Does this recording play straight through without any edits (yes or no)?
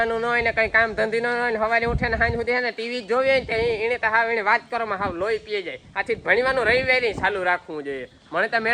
yes